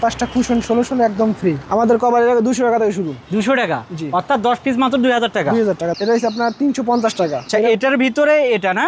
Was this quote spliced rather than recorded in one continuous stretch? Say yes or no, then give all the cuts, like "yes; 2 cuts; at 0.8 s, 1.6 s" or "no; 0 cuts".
yes; 3 cuts; at 1.6 s, 5.9 s, 7.5 s